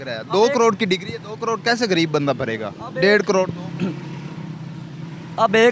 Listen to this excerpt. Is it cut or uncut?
uncut